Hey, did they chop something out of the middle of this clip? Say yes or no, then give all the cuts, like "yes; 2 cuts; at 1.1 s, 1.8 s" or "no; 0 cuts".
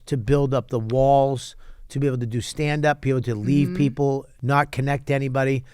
yes; 1 cut; at 4.3 s